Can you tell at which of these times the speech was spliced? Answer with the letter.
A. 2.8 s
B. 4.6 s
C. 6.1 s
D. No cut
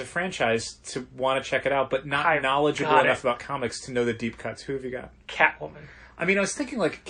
D